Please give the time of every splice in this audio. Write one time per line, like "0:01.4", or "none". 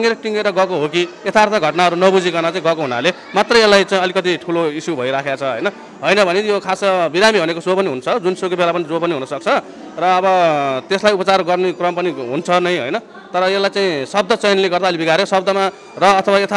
none

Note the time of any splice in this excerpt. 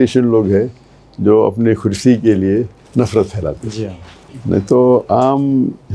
none

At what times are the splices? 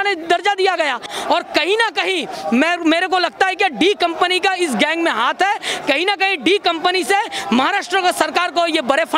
0:01.1

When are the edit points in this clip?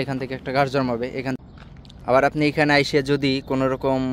0:01.4

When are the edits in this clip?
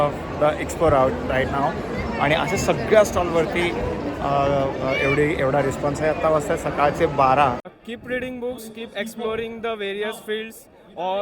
0:07.7

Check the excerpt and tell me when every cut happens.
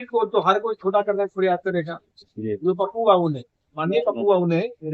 none

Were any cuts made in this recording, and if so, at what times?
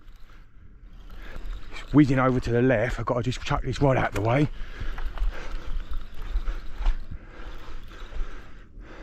0:01.4

